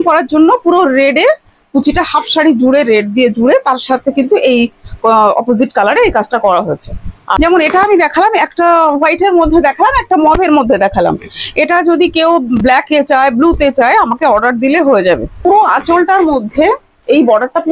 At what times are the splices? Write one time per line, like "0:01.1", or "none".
0:07.4
0:15.4